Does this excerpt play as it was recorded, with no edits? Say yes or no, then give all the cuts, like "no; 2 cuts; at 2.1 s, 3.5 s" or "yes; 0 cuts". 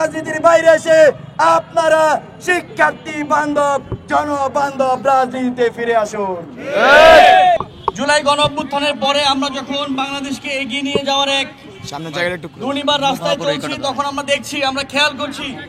yes; 0 cuts